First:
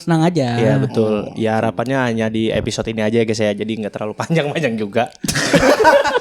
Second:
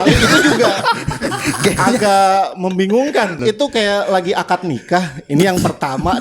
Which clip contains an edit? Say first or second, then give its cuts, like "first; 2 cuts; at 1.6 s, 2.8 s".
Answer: second; 1 cut; at 3.4 s